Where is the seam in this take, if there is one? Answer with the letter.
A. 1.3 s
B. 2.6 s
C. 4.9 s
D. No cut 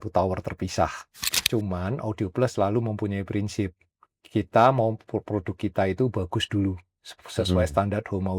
A